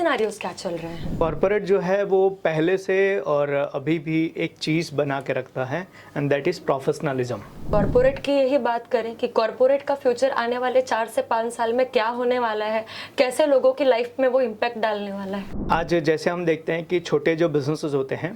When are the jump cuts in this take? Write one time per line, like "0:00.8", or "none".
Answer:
0:01.2
0:07.7
0:15.5